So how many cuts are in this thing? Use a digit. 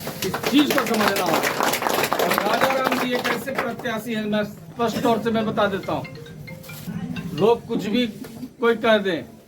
1